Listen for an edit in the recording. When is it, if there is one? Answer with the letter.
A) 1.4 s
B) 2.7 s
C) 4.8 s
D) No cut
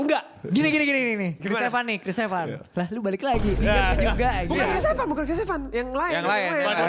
A